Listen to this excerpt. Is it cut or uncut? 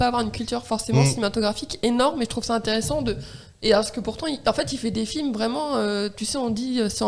uncut